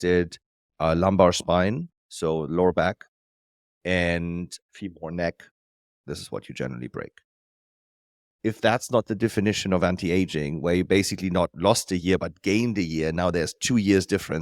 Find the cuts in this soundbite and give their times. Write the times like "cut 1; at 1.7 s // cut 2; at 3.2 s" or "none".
cut 1; at 4.6 s